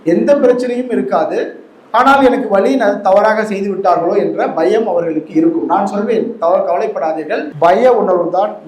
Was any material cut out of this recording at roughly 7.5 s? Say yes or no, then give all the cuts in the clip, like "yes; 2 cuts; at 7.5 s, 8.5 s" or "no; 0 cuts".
yes; 1 cut; at 7.5 s